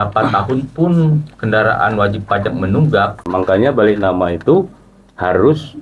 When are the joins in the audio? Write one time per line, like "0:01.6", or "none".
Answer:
0:03.2

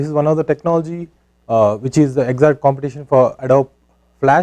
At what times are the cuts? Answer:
0:02.1

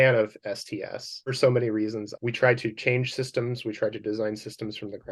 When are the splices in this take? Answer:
0:01.3
0:02.1

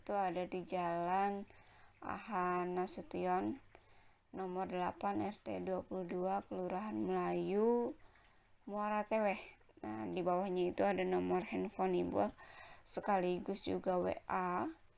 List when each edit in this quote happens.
0:07.8

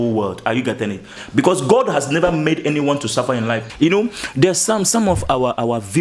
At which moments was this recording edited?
0:01.2
0:03.7

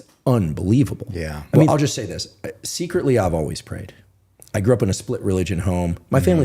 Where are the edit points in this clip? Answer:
0:01.7

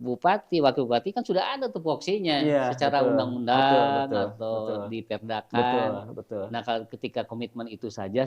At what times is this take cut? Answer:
none

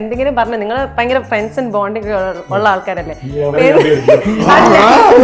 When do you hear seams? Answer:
none

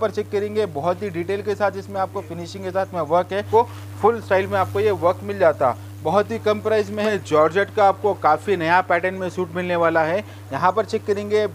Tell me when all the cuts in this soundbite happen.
0:03.5
0:07.0

